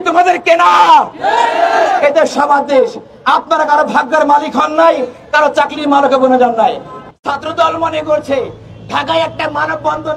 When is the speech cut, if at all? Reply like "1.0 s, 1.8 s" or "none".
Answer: 6.9 s